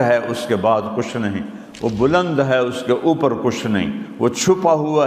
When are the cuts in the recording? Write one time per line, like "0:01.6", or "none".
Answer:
none